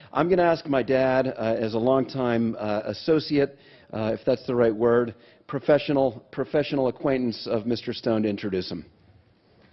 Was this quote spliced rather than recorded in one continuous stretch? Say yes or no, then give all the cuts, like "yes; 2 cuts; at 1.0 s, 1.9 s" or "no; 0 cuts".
no; 0 cuts